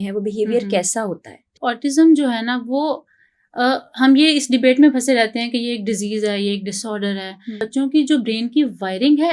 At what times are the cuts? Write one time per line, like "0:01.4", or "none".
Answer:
0:01.5
0:07.6